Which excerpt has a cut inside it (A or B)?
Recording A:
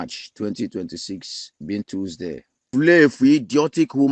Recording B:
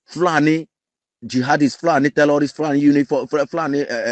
A